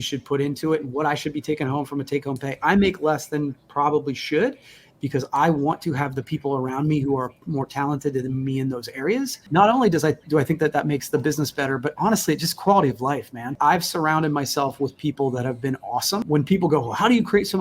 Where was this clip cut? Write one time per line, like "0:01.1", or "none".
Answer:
0:09.4
0:13.5
0:16.2